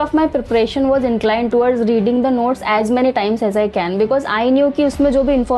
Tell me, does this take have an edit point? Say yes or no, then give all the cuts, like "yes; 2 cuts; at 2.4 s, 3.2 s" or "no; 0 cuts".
no; 0 cuts